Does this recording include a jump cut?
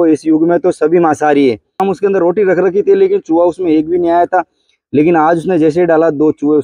yes; 1 cut; at 1.8 s

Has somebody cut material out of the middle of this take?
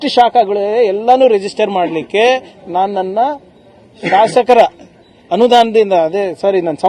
no; 0 cuts

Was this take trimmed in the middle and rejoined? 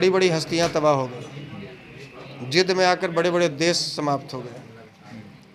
no; 0 cuts

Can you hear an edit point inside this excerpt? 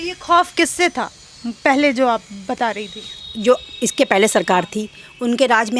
no; 0 cuts

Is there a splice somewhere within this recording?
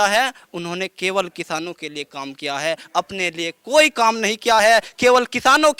no; 0 cuts

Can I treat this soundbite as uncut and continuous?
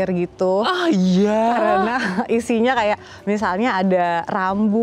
yes; 0 cuts

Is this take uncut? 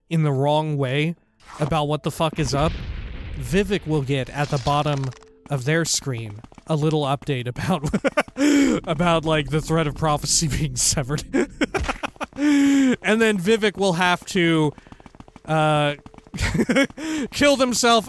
yes; 0 cuts

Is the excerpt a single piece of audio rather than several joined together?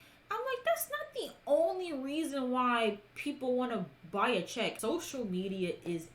no; 1 cut; at 4.8 s

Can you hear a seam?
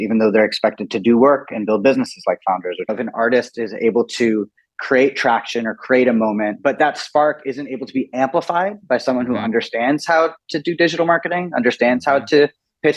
yes; 2 cuts; at 3.0 s, 6.6 s

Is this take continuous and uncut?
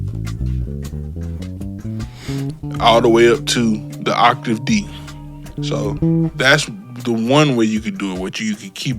no; 1 cut; at 5.5 s

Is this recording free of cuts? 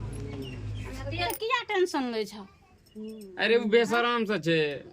no; 1 cut; at 1.3 s

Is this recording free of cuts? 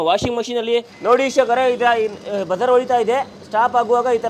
no; 1 cut; at 0.9 s

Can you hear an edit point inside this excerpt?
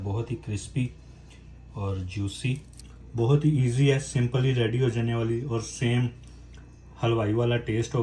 yes; 1 cut; at 2.8 s

